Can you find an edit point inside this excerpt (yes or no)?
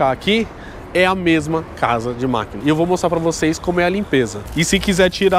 yes